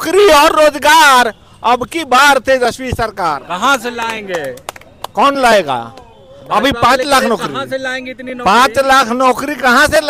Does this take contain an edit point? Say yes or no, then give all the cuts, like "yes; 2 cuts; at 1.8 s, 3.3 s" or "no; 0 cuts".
no; 0 cuts